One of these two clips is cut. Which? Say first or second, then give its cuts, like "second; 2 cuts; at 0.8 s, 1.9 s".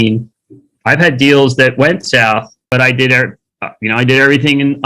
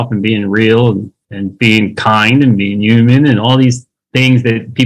first; 1 cut; at 2.6 s